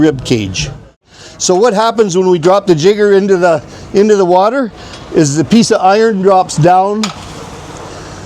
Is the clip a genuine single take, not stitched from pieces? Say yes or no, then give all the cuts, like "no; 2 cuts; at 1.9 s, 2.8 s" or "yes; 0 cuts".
no; 1 cut; at 1.2 s